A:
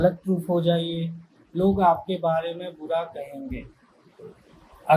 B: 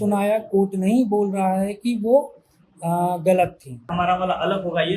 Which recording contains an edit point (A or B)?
B